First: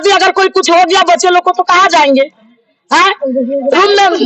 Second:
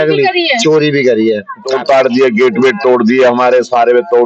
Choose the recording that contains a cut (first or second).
second